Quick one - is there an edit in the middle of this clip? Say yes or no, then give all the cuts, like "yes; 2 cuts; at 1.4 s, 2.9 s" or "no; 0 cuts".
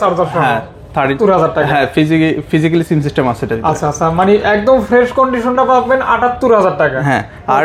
yes; 1 cut; at 1.1 s